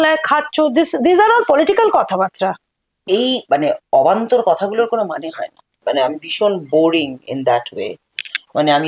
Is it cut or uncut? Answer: cut